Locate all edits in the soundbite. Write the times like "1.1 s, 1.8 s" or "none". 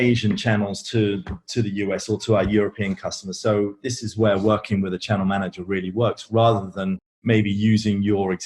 7.1 s